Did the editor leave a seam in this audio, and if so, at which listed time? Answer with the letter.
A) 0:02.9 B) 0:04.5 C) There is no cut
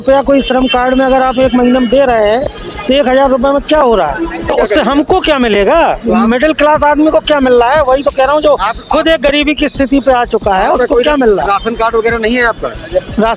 B